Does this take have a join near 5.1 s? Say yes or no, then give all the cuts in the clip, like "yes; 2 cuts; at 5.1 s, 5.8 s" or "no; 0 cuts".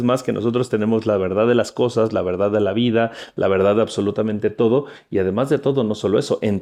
no; 0 cuts